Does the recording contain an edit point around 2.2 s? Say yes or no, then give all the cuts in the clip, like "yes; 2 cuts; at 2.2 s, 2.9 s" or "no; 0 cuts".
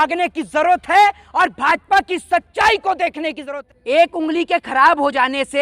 no; 1 cut; at 3.5 s